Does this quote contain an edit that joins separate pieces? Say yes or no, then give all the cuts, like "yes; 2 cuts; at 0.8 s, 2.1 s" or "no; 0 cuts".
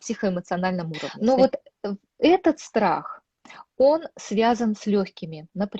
yes; 1 cut; at 1.0 s